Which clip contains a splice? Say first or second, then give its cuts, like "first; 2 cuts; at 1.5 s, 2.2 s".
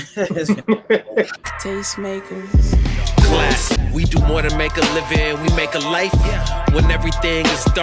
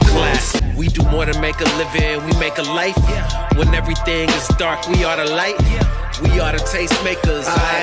first; 1 cut; at 1.5 s